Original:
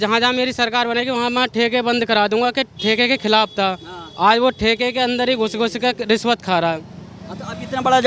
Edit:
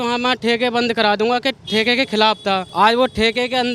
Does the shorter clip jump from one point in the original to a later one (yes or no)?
yes